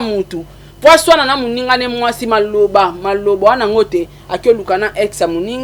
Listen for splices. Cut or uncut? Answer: uncut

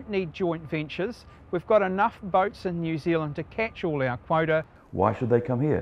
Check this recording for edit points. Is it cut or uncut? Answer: cut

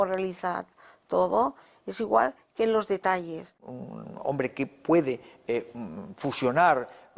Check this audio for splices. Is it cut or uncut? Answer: cut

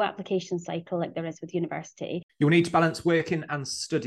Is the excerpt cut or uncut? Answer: cut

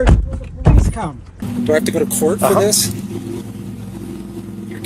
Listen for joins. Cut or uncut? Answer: cut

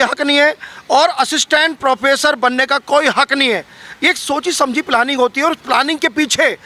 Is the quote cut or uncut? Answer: uncut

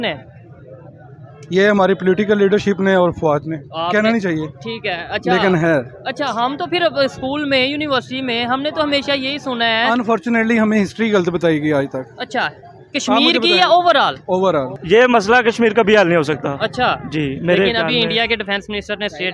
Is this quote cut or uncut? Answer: cut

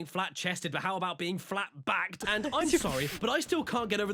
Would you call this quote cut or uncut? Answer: uncut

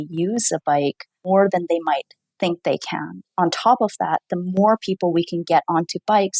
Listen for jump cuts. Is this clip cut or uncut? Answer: cut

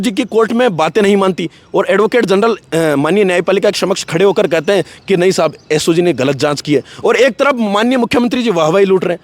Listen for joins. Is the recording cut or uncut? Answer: uncut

